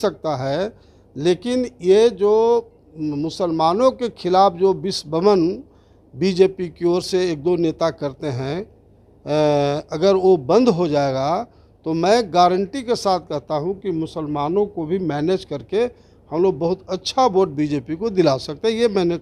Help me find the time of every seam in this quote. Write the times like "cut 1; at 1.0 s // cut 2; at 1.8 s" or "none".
none